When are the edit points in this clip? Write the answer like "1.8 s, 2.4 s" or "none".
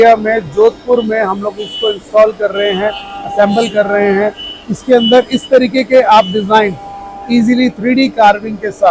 none